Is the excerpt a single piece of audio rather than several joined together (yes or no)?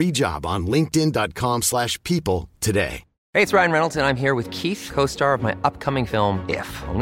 no